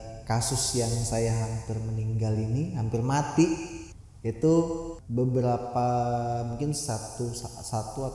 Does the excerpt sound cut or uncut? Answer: cut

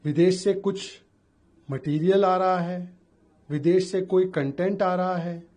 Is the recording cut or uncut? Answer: uncut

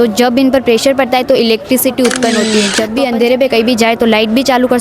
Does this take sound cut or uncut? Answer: cut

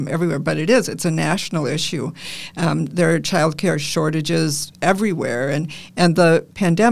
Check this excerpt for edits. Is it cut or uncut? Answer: uncut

